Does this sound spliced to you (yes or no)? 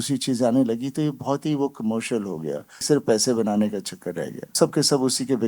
yes